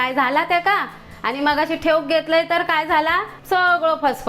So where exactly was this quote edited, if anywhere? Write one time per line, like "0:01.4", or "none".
0:03.3